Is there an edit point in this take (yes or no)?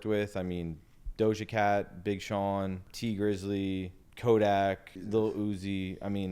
yes